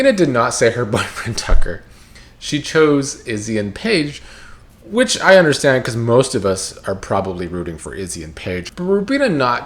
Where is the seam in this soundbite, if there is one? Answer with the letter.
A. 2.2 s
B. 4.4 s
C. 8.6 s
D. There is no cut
C